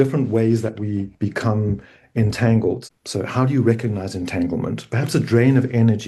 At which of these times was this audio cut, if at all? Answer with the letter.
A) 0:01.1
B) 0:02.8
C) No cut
B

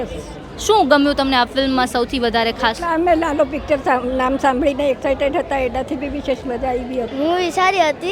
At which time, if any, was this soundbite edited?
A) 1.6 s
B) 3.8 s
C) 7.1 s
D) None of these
C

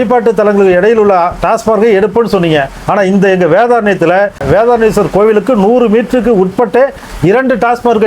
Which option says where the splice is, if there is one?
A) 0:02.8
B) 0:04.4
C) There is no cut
B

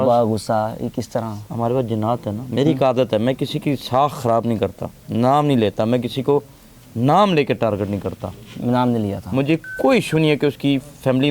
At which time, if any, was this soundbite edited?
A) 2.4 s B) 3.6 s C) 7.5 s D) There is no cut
A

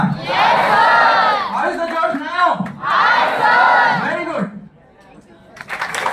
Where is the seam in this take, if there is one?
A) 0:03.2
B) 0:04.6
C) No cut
C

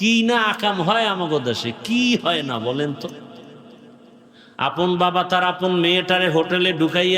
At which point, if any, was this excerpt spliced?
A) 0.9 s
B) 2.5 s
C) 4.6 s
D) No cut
D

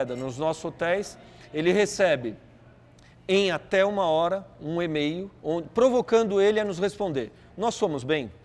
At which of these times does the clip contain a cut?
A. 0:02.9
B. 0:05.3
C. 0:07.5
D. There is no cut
B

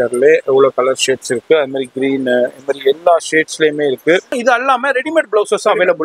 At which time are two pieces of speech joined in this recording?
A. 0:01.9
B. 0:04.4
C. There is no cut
B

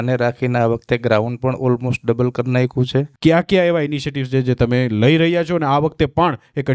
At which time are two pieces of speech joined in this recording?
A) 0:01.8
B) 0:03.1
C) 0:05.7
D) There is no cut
B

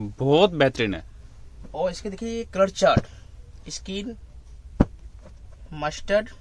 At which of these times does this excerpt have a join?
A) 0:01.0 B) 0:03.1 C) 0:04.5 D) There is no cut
D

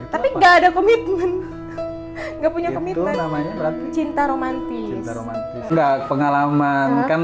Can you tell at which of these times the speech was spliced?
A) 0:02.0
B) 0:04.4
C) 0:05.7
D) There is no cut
C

